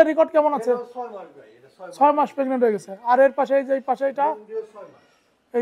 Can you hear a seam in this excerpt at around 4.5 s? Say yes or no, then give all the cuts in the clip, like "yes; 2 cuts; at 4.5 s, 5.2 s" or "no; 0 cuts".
no; 0 cuts